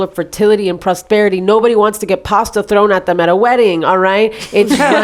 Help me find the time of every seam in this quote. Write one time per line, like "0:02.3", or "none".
none